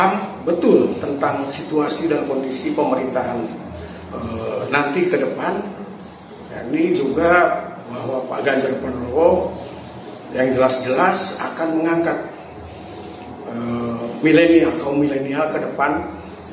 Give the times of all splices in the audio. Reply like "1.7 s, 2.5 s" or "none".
none